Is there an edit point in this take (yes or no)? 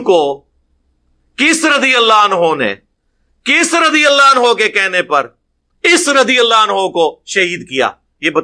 no